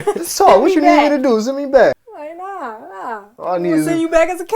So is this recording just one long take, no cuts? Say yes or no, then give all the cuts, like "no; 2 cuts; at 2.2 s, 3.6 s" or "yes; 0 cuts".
no; 1 cut; at 2.0 s